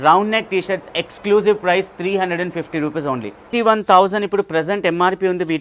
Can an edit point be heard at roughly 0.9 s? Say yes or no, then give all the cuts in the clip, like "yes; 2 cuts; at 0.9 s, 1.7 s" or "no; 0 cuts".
no; 1 cut; at 3.5 s